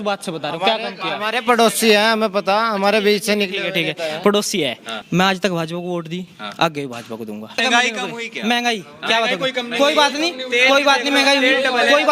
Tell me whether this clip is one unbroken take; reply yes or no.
no